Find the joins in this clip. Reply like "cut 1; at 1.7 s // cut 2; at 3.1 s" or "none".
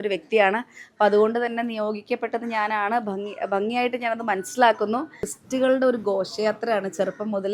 cut 1; at 5.4 s

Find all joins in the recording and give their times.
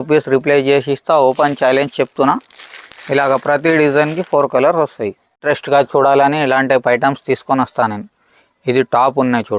cut 1; at 5.4 s

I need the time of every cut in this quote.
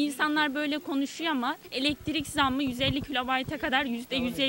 none

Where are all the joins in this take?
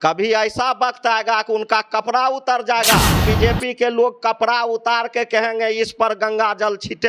cut 1; at 3.3 s

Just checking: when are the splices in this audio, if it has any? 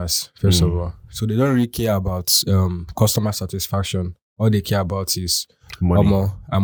none

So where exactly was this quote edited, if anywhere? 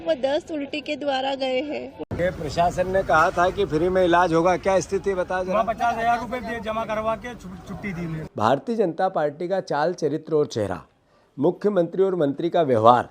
cut 1; at 1.9 s // cut 2; at 8.2 s

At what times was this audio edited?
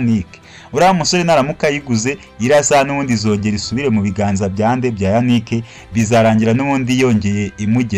none

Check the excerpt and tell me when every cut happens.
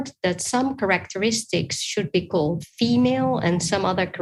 none

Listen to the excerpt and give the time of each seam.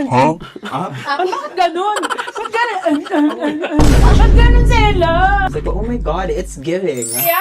cut 1; at 5.5 s

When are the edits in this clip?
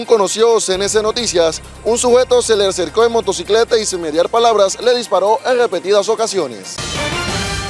cut 1; at 6.7 s

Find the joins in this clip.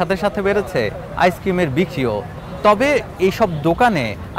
none

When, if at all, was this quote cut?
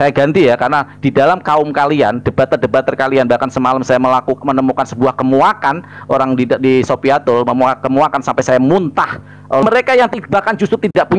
cut 1; at 9.6 s

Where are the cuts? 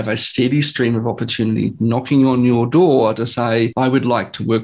cut 1; at 3.7 s

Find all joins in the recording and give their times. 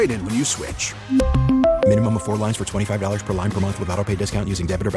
none

